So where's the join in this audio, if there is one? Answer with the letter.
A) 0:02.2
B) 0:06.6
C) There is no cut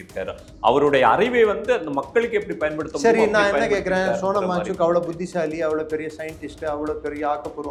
C